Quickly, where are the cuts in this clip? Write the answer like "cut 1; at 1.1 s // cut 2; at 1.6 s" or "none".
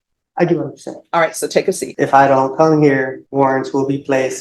cut 1; at 1.9 s // cut 2; at 3.2 s